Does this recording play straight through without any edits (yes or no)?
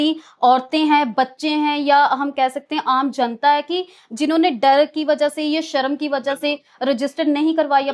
yes